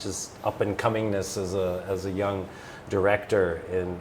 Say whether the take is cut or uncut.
uncut